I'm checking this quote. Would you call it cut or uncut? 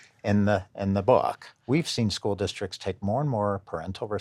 cut